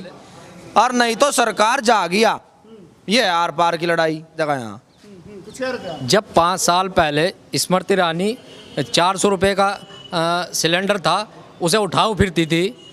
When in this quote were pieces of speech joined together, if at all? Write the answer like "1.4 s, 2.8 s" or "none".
none